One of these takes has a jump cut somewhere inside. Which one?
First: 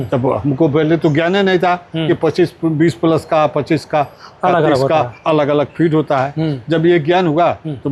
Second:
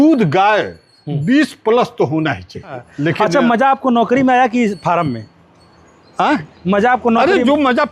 second; 1 cut; at 2.9 s

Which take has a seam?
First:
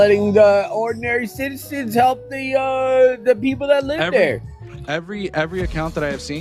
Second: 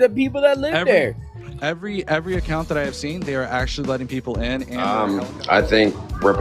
second; 1 cut; at 4.9 s

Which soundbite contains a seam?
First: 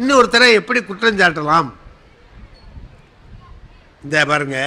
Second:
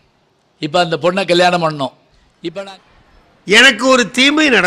second; 1 cut; at 2.5 s

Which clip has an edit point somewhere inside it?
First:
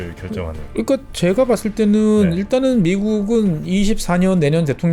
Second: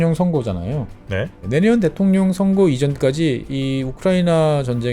second; 1 cut; at 1.4 s

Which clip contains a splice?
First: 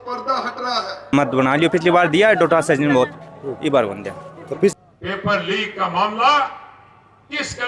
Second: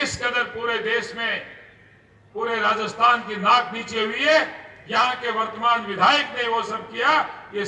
first; 2 cuts; at 1.1 s, 4.7 s

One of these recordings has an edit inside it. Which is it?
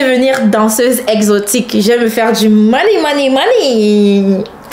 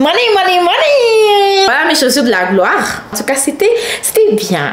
second; 2 cuts; at 1.7 s, 3.2 s

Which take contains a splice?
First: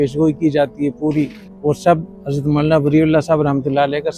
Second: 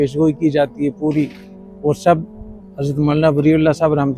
first; 2 cuts; at 1.4 s, 2.2 s

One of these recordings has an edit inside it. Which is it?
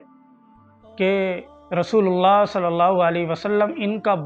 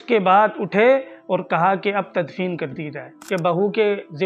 second; 1 cut; at 3.1 s

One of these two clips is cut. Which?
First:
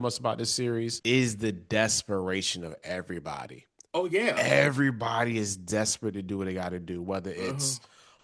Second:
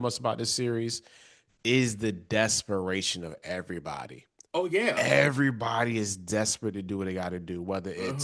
first; 1 cut; at 1.0 s

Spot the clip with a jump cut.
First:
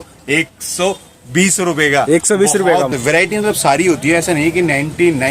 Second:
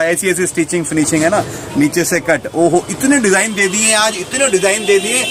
first; 1 cut; at 2.9 s

